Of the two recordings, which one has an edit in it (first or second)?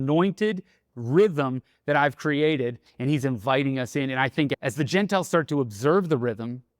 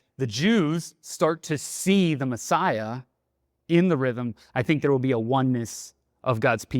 first